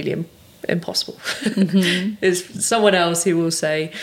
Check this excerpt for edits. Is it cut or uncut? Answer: uncut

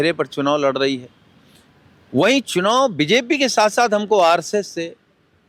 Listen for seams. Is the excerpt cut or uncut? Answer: uncut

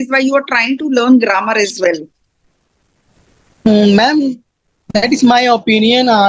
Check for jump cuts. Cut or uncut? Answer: uncut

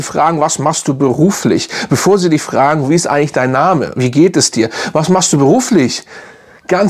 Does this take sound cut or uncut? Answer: uncut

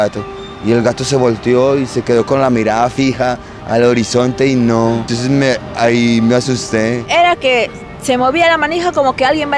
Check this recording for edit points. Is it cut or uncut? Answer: cut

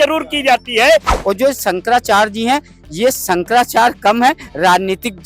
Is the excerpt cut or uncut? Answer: cut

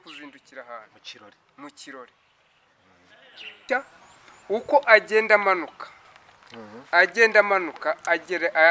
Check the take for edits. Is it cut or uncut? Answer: cut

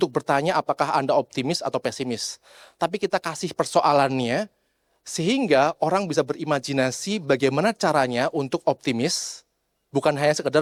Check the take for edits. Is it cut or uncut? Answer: uncut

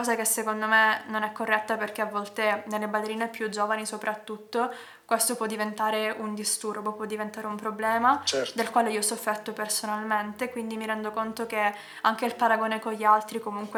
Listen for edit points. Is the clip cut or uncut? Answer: uncut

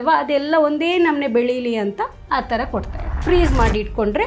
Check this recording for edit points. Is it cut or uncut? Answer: cut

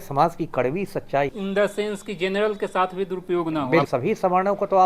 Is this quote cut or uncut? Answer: cut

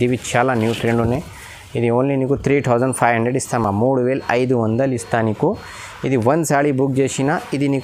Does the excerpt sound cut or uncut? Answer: uncut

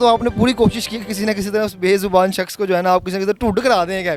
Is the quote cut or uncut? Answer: uncut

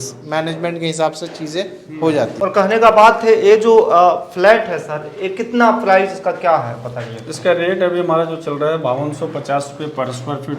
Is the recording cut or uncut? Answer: cut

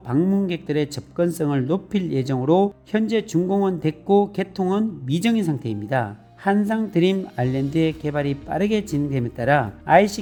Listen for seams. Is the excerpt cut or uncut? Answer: uncut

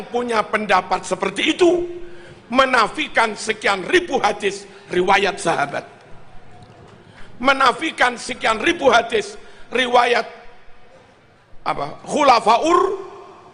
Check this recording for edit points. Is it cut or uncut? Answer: uncut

